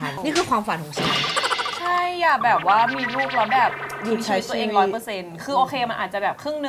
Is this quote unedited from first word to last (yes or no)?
yes